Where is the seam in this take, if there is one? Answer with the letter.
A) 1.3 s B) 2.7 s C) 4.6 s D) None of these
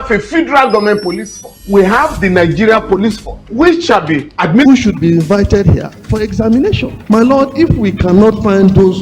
C